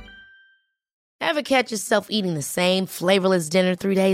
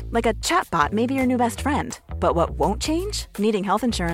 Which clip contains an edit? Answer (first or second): first